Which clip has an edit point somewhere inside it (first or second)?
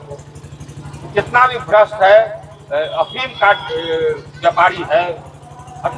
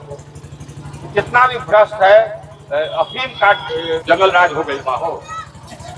second